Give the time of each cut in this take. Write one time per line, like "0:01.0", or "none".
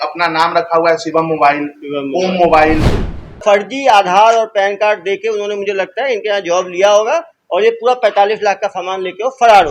0:03.4